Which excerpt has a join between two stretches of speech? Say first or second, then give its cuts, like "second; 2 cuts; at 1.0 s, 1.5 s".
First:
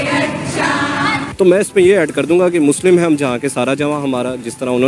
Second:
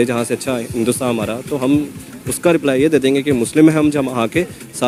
first; 1 cut; at 1.3 s